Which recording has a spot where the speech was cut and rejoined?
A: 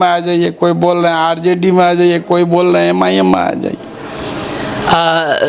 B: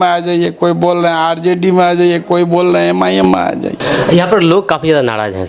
B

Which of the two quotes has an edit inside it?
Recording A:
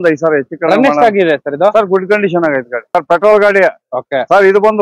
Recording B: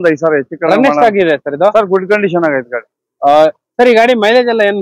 A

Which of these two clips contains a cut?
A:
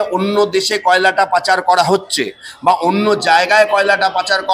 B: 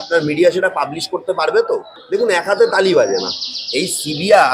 B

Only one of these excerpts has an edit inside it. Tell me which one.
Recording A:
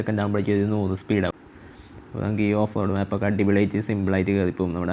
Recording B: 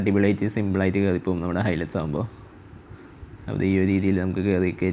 A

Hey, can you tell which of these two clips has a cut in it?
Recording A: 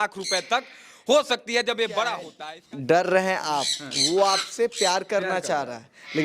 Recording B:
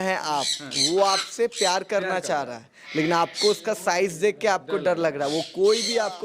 A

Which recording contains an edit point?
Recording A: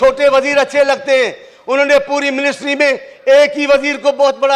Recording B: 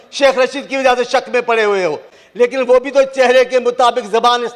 B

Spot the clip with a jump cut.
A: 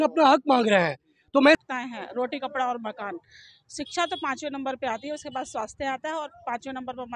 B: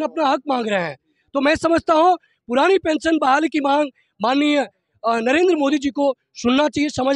A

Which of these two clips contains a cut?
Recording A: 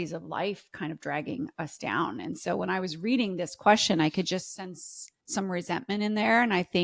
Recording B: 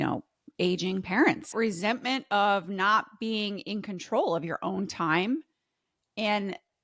B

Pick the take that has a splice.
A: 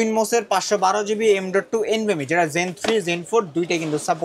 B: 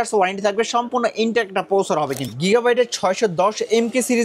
B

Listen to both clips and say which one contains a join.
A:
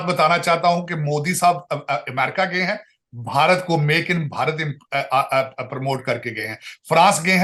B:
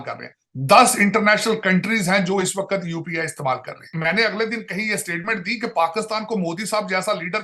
B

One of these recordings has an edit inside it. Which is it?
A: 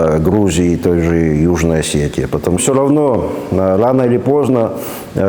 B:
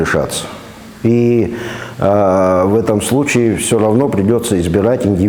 A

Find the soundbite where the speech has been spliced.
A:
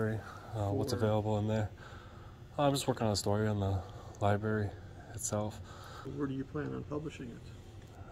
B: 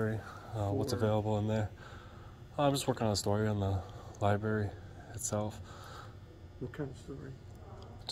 A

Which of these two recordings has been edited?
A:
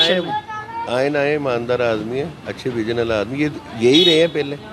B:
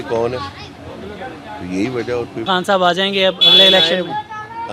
B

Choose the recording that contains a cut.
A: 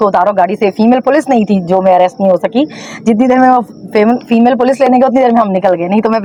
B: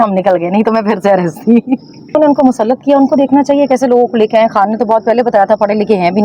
B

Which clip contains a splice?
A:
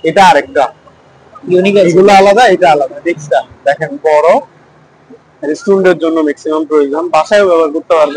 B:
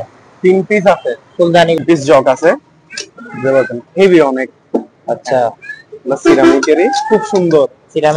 B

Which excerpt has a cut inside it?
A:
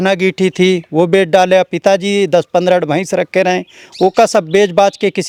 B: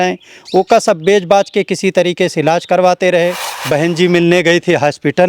B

